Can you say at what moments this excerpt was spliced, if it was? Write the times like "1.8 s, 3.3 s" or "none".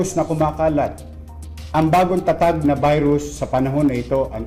none